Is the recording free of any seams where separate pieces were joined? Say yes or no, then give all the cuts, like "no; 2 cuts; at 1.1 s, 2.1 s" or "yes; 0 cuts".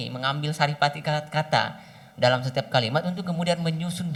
yes; 0 cuts